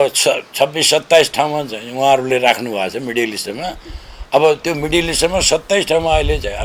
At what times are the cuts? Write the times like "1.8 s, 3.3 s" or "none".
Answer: none